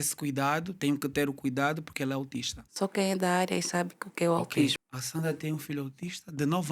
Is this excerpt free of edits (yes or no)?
no